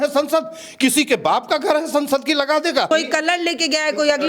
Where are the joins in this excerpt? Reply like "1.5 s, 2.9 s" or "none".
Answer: 2.9 s